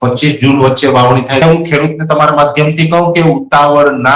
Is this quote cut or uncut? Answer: cut